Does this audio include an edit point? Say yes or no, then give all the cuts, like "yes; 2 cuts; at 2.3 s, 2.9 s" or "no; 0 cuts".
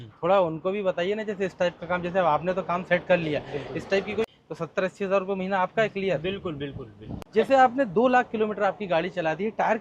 yes; 2 cuts; at 4.2 s, 7.3 s